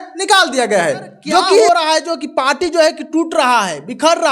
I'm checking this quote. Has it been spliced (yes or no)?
yes